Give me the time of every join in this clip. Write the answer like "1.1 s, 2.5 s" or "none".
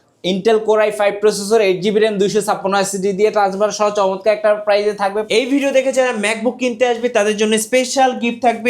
5.2 s